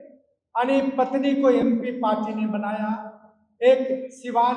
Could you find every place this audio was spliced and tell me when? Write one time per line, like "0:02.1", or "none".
none